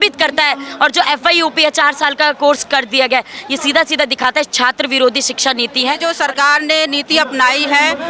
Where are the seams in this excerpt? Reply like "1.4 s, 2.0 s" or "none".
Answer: 6.0 s

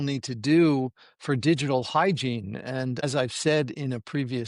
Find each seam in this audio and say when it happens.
3.0 s

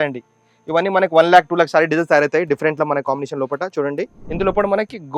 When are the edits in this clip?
4.2 s

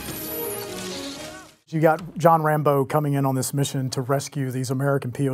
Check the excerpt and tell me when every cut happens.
1.7 s

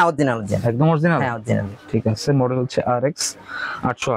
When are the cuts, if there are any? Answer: none

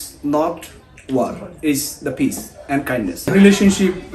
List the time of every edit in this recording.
3.2 s

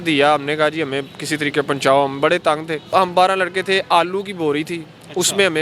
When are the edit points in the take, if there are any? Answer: 2.9 s

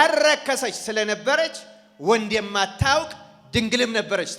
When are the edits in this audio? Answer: none

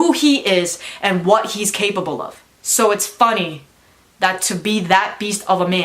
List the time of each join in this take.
2.6 s

